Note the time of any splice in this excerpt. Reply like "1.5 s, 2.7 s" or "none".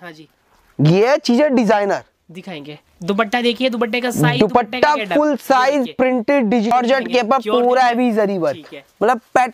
6.7 s